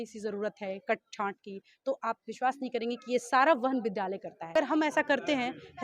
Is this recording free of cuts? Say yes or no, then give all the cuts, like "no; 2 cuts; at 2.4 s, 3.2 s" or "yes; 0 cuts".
no; 1 cut; at 4.5 s